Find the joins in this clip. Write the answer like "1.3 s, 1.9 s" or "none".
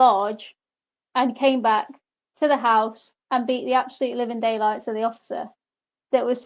none